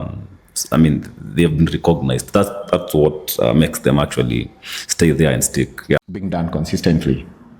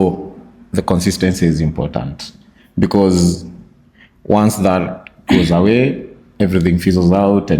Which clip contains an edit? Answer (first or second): first